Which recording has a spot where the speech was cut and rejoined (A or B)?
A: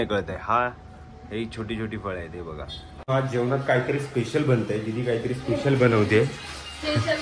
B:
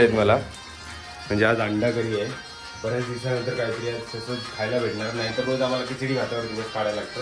A